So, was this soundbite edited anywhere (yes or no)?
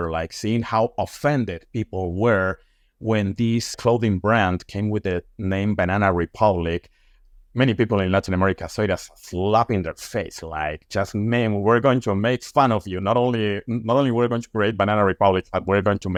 no